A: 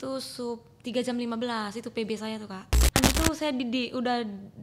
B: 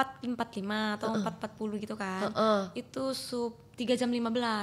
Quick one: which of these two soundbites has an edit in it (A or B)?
A